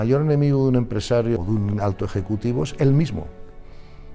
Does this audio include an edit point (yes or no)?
yes